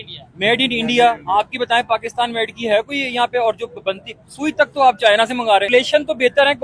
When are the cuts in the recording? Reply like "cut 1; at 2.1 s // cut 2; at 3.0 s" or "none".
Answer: cut 1; at 5.7 s